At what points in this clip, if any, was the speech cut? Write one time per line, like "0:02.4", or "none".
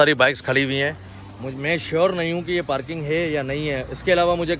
none

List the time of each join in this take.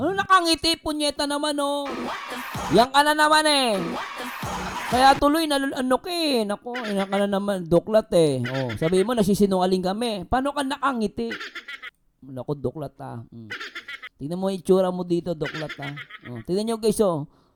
none

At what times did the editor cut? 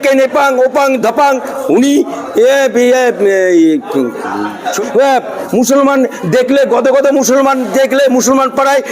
0:04.8

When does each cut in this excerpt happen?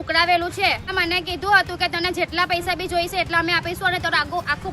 0:00.9

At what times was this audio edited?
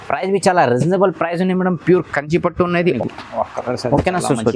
0:03.0

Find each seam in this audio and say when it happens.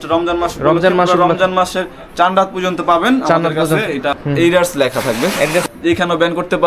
0:04.2
0:05.7

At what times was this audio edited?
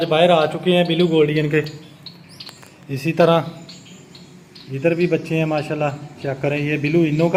none

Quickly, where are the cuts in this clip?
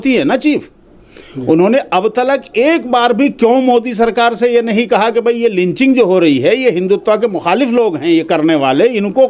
none

